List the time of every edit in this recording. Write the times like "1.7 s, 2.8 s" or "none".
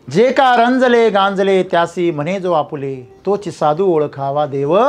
3.0 s